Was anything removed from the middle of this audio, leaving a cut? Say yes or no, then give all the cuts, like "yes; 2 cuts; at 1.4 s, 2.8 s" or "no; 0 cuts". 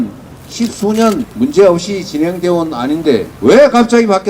yes; 2 cuts; at 1.3 s, 3.3 s